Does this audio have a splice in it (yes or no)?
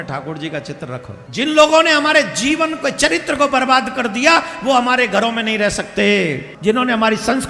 yes